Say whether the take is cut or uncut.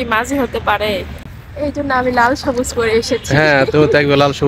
cut